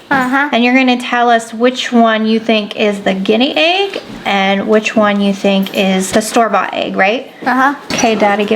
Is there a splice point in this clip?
yes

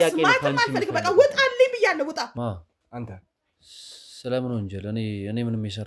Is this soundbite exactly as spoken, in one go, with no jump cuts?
no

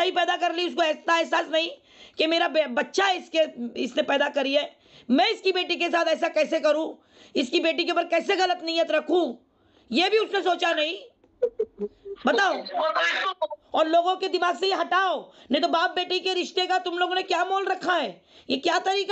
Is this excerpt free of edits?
no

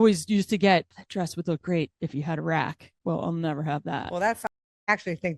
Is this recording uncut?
no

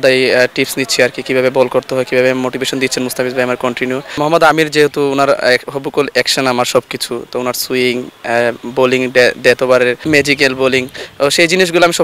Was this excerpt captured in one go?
no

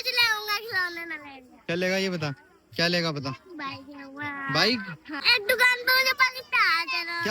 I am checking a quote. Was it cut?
yes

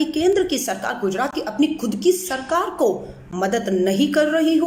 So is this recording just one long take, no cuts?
yes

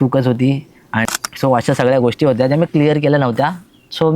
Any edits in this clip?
yes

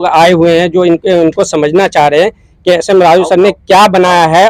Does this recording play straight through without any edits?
yes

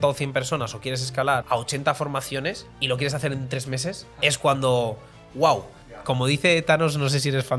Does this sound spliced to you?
yes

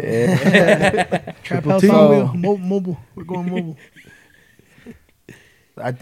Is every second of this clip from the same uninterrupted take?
yes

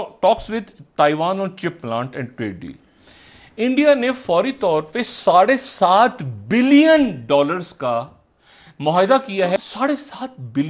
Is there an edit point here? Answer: yes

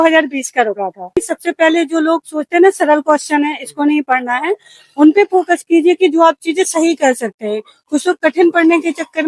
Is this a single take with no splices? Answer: no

